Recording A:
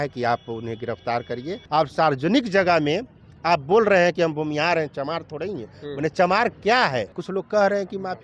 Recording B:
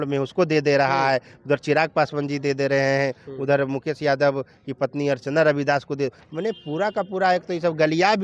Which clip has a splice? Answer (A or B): A